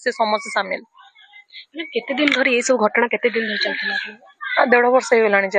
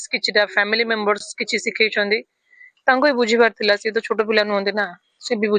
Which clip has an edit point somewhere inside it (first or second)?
first